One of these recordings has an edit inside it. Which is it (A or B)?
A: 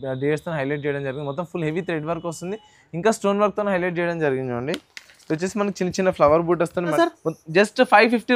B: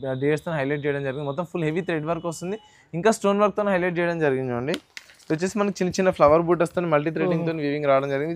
A